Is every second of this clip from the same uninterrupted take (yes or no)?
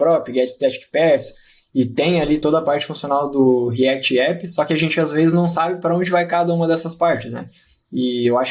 yes